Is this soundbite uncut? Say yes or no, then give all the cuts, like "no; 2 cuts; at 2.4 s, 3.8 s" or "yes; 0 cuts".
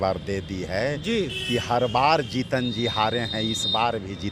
yes; 0 cuts